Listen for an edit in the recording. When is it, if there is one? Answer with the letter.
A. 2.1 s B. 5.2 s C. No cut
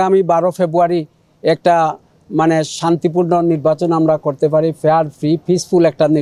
C